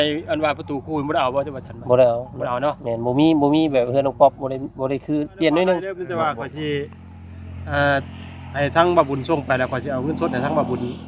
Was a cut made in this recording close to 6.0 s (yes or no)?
yes